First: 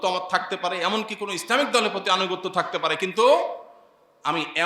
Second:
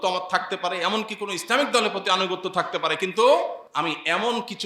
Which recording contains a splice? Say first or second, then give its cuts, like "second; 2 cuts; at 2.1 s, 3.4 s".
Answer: second; 1 cut; at 3.6 s